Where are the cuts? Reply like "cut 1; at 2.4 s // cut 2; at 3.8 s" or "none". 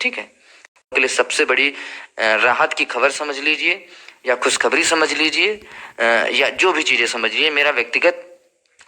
cut 1; at 0.9 s